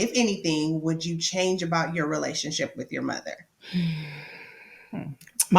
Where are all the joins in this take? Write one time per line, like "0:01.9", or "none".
0:03.5

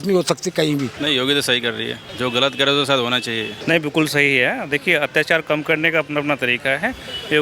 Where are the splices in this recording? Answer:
0:00.9
0:02.0
0:03.5

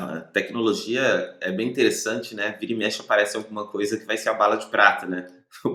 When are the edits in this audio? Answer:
none

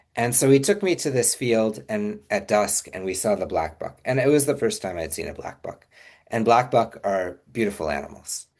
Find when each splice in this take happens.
none

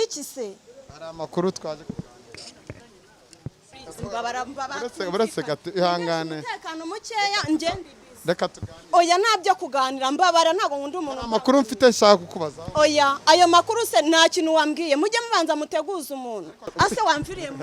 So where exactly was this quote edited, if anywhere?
0:03.7
0:16.6

